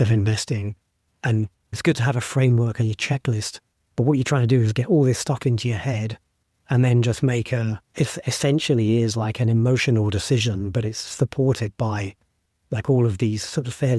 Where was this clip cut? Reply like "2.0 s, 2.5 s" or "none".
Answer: 1.8 s, 7.9 s